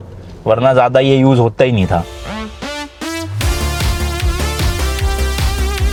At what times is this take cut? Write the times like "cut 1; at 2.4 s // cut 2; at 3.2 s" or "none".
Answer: none